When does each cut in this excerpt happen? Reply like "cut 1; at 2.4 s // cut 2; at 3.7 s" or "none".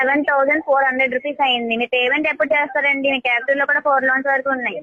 none